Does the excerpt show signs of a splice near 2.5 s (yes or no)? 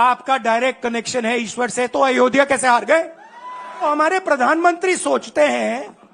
no